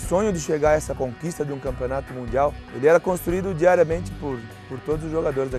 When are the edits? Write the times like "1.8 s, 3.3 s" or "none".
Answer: 0.9 s, 2.6 s